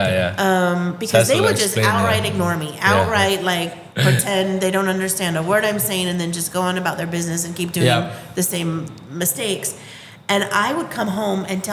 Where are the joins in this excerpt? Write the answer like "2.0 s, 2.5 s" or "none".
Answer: none